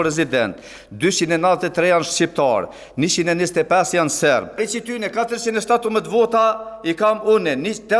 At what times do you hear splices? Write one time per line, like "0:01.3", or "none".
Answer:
0:04.5